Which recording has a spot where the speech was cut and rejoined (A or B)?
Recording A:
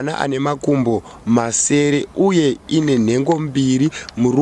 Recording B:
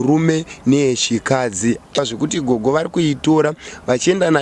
B